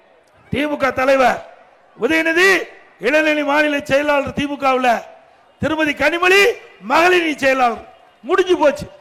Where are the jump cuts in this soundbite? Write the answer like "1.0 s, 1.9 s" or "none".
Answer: none

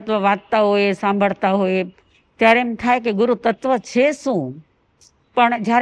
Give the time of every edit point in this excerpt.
none

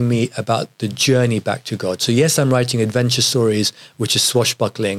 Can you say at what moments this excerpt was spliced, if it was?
none

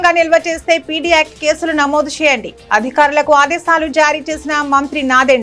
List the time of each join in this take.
none

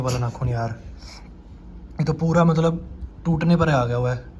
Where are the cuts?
none

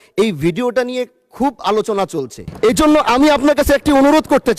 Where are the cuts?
2.4 s

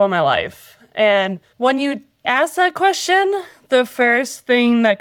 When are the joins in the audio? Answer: 1.5 s, 2.3 s

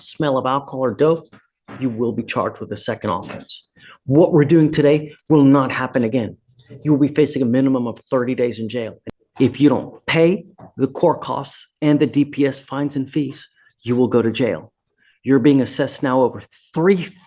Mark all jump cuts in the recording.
9.0 s

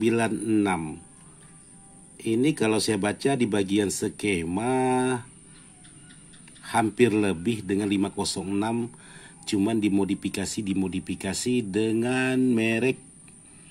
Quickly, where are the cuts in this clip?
none

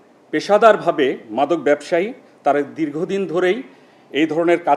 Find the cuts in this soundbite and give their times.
none

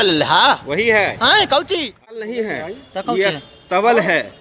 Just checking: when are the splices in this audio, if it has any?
2.1 s

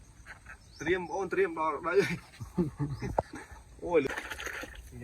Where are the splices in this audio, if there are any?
4.1 s

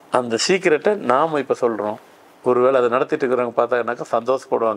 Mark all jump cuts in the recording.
none

